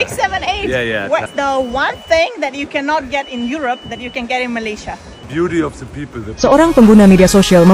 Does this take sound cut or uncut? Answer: cut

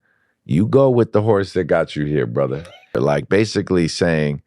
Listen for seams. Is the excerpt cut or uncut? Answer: cut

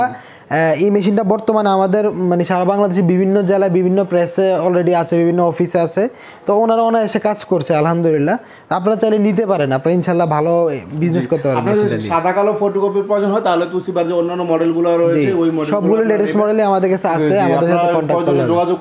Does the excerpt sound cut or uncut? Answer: uncut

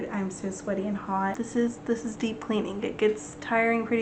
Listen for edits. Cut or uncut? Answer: cut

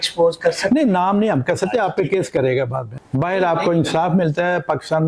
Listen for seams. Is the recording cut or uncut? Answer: cut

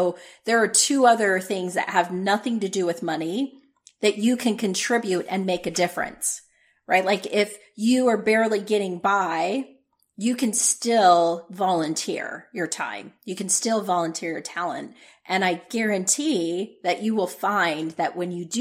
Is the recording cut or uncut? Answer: uncut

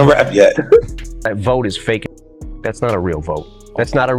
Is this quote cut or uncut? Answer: cut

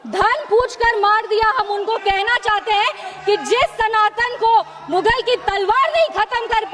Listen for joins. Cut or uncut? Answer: uncut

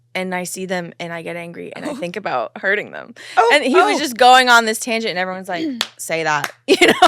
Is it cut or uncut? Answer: uncut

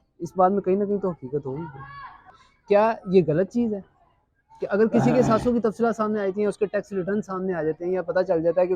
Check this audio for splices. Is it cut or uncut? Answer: cut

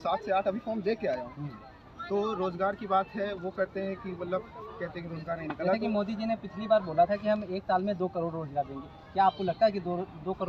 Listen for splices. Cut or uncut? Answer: uncut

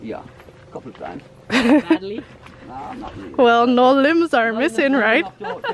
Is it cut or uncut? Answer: uncut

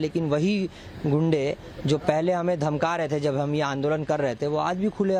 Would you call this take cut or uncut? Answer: uncut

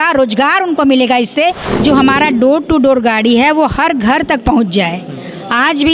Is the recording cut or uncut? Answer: cut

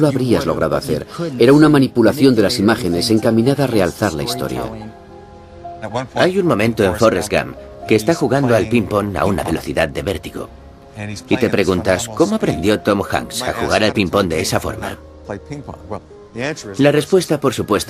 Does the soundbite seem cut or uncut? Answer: uncut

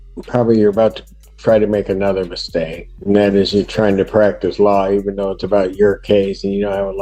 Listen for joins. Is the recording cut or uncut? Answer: uncut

